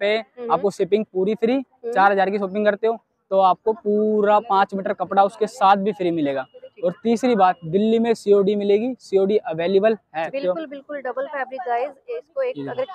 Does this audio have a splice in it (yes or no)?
yes